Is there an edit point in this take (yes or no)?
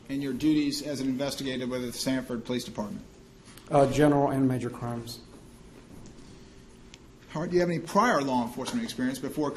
no